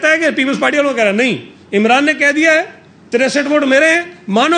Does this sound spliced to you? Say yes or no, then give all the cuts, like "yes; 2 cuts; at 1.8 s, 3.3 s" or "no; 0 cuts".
no; 0 cuts